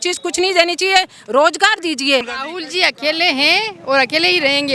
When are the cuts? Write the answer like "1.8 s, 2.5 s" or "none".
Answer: 2.4 s